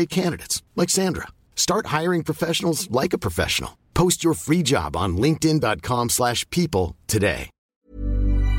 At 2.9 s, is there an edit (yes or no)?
no